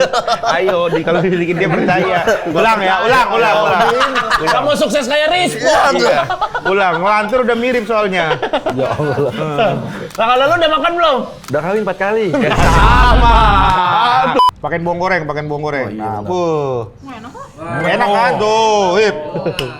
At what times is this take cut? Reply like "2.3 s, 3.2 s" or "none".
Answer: 14.4 s